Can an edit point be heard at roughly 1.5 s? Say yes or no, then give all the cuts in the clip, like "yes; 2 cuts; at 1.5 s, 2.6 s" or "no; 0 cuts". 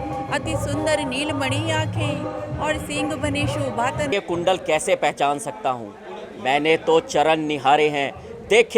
no; 1 cut; at 4.1 s